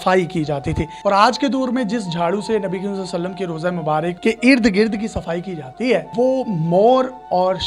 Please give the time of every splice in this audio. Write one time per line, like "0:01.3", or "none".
0:00.9
0:04.2
0:06.1